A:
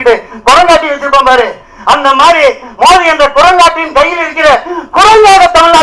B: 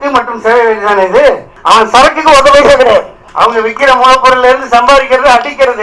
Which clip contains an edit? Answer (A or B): B